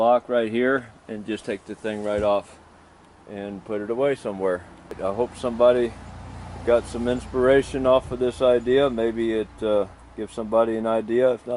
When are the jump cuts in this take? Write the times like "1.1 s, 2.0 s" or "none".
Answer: 5.0 s